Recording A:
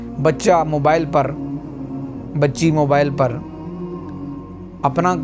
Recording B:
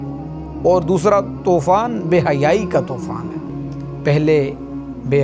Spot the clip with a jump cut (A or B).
B